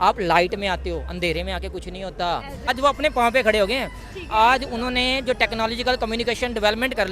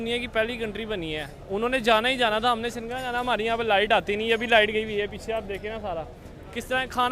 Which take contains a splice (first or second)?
first